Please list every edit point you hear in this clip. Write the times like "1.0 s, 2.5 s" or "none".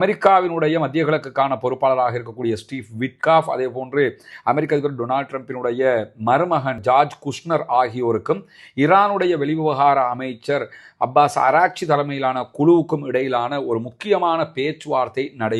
none

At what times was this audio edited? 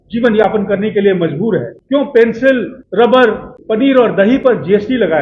1.7 s, 2.8 s, 3.5 s

